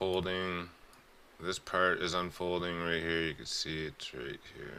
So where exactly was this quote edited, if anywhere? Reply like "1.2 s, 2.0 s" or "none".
none